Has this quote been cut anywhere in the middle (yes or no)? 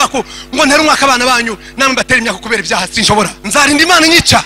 yes